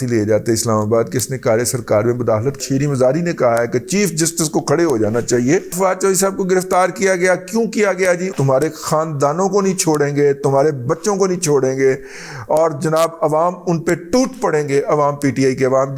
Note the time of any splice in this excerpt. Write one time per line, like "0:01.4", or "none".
0:02.6
0:05.7
0:08.3